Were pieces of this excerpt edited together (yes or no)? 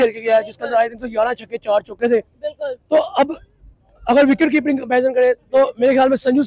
no